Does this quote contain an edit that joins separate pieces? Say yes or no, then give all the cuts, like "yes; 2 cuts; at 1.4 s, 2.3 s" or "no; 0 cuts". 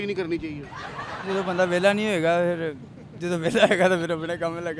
yes; 1 cut; at 1.2 s